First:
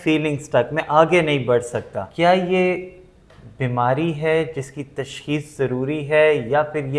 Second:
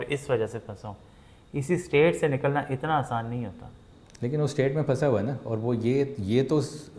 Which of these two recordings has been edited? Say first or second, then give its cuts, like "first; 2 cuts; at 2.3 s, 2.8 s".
first; 1 cut; at 2.0 s